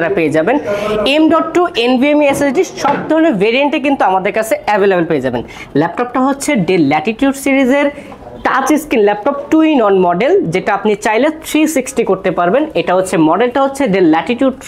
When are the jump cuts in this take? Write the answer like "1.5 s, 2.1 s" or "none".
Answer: none